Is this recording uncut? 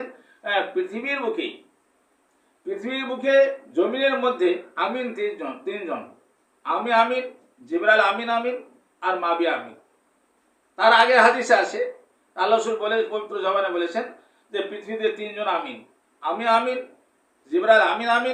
yes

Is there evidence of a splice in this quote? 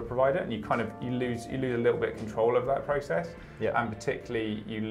no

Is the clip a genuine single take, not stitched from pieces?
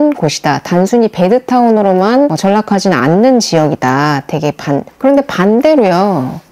no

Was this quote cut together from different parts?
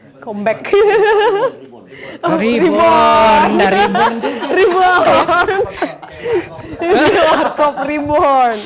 no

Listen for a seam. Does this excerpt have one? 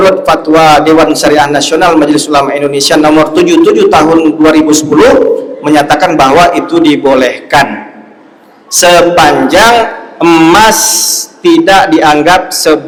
no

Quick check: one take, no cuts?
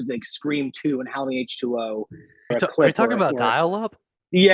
no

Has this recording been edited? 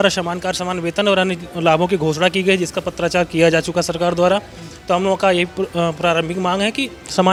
no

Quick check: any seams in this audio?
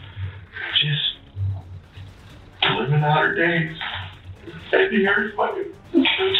no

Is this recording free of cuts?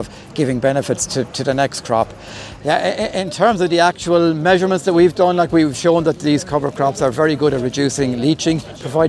yes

